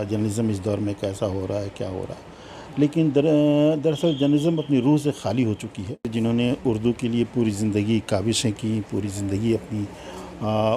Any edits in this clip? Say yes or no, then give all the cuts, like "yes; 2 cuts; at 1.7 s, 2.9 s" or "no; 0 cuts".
yes; 1 cut; at 6.1 s